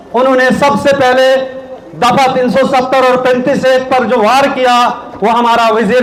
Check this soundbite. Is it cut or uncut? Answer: uncut